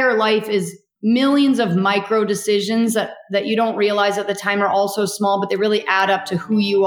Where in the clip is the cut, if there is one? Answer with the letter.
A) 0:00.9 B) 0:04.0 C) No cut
A